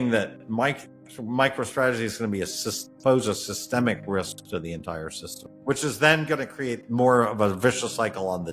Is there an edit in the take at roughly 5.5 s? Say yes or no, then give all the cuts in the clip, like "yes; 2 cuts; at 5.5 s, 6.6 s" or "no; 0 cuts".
yes; 1 cut; at 5.5 s